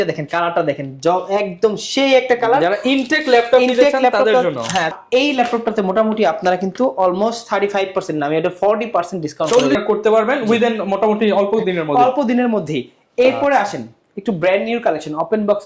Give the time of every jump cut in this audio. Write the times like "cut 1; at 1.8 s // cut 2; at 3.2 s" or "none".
cut 1; at 5.0 s // cut 2; at 9.8 s